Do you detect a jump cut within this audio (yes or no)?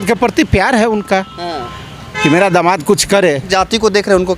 yes